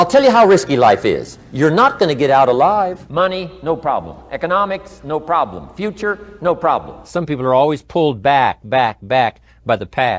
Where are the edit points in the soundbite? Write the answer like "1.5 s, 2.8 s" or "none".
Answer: 3.0 s, 7.1 s